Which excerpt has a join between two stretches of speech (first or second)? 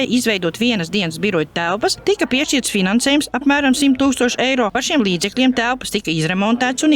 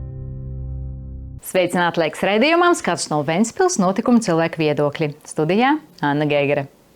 second